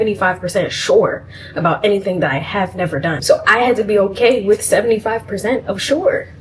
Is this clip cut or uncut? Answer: cut